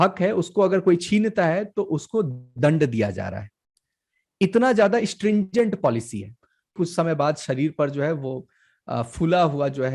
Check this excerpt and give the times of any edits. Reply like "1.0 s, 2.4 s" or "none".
6.6 s